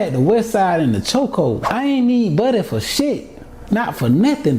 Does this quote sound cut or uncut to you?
cut